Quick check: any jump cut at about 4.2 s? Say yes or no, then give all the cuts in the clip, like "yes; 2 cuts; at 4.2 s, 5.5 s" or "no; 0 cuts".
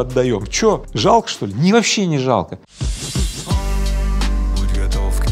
no; 2 cuts; at 0.9 s, 2.6 s